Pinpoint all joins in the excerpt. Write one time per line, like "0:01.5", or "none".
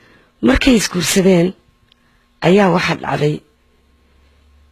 none